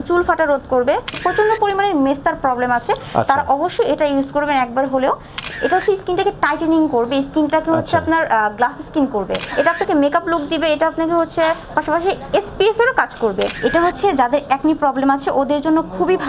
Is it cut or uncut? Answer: cut